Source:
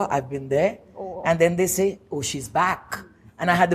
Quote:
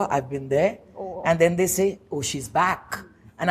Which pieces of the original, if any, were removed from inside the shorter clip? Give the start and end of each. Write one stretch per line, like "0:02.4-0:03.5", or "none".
none